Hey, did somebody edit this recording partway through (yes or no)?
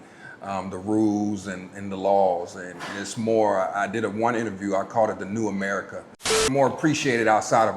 yes